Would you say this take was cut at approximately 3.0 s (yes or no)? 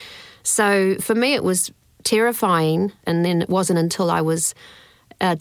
yes